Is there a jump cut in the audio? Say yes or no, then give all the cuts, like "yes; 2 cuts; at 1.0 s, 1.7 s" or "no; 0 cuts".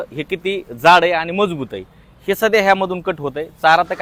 no; 0 cuts